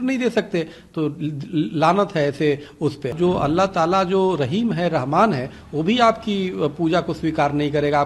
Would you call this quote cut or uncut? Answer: cut